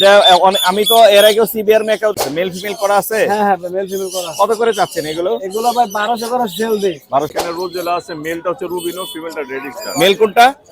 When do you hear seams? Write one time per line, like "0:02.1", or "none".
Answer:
0:02.2
0:07.4